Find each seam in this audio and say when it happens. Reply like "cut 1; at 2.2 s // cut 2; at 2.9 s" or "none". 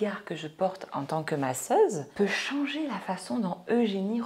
cut 1; at 2.1 s